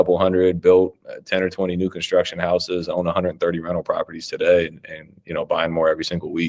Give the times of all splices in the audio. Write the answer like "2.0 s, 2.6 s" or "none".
none